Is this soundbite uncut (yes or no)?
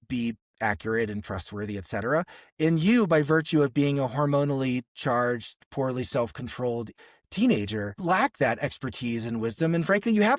no